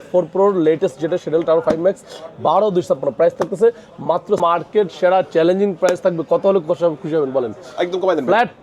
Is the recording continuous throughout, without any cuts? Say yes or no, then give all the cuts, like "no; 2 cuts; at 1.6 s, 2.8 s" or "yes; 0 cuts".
no; 1 cut; at 4.4 s